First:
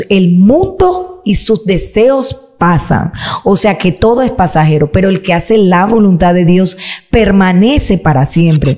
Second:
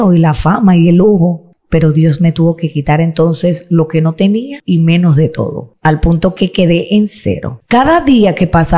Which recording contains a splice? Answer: second; 4 cuts; at 1.5 s, 4.5 s, 5.7 s, 7.5 s

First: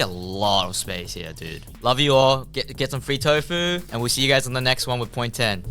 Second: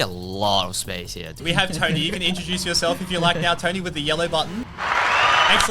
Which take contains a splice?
second; 1 cut; at 1.4 s

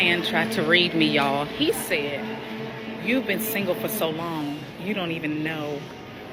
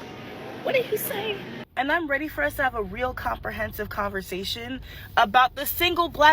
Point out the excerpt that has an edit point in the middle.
second; 1 cut; at 1.6 s

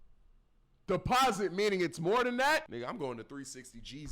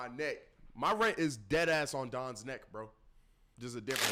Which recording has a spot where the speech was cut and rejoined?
first; 1 cut; at 2.7 s

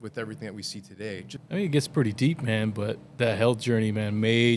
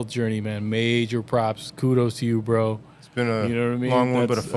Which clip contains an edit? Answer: first; 1 cut; at 1.3 s

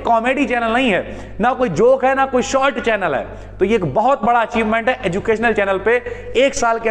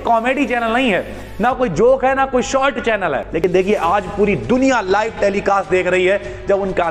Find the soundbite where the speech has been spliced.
second; 1 cut; at 3.4 s

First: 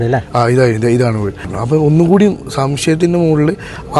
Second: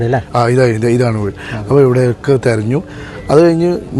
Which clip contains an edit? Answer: first; 1 cut; at 1.5 s

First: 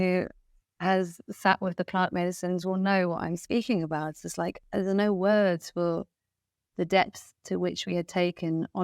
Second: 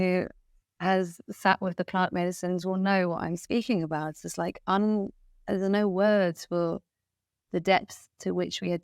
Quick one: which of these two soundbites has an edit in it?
first; 1 cut; at 4.6 s

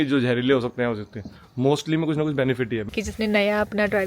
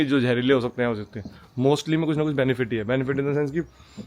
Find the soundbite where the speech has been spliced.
first; 1 cut; at 2.9 s

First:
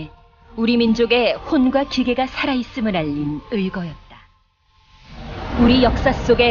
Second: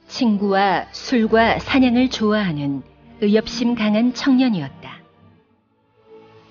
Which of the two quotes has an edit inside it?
first; 1 cut; at 3.4 s

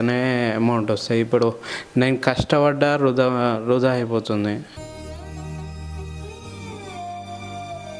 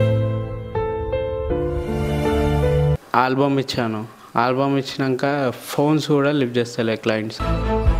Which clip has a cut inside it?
second; 1 cut; at 2.9 s

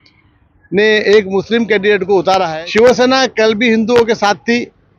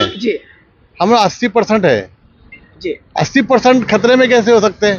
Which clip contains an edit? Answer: first; 1 cut; at 2.5 s

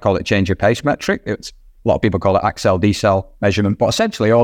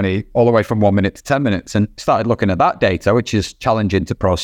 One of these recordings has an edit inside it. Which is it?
second; 1 cut; at 2.0 s

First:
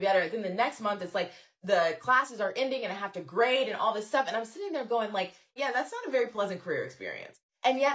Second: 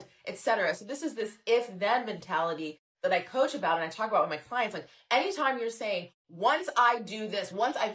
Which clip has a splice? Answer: first; 1 cut; at 5.5 s

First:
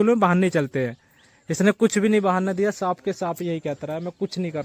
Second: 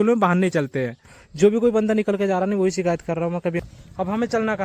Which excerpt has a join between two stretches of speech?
second; 2 cuts; at 1.2 s, 3.6 s

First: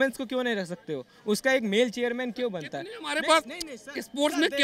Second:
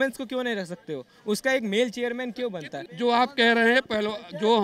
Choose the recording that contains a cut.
second; 1 cut; at 2.8 s

